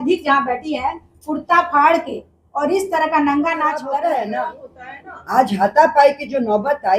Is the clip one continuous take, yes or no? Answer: no